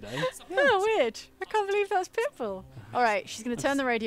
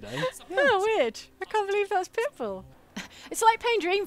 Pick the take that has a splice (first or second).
second